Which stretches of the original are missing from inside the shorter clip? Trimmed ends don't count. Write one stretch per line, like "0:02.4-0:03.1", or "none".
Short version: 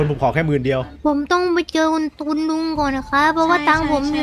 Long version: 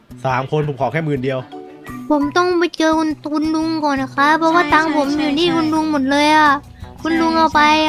0:01.5-0:02.0